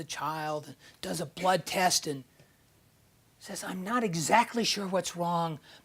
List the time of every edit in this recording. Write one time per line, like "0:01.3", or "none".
none